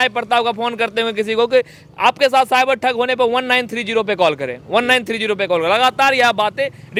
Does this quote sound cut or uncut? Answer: uncut